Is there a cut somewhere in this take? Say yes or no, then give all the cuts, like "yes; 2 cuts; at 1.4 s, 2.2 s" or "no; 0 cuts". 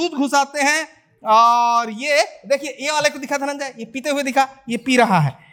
no; 0 cuts